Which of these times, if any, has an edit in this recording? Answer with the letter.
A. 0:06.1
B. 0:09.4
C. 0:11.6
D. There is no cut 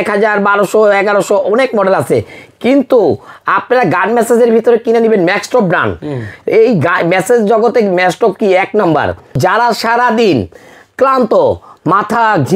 B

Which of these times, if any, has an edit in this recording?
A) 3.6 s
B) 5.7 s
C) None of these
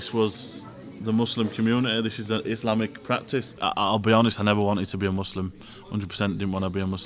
A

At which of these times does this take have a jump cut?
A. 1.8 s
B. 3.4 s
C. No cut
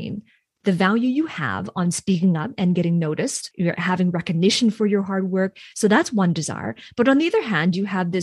B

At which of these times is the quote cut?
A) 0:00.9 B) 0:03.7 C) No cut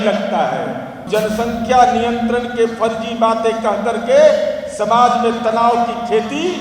A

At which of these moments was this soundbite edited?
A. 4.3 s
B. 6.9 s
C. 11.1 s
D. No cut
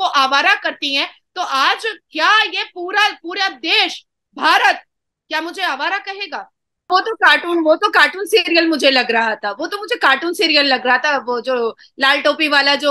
B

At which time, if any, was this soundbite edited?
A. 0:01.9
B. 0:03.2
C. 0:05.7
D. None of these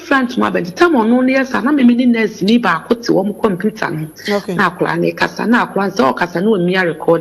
D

